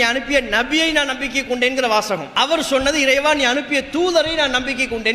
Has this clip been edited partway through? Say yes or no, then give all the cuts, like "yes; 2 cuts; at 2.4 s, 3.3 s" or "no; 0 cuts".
yes; 1 cut; at 2.3 s